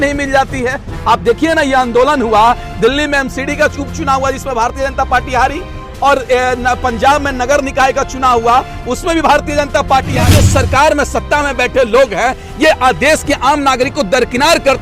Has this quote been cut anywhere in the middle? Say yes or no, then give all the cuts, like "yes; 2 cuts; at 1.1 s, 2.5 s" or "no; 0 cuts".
yes; 1 cut; at 10.1 s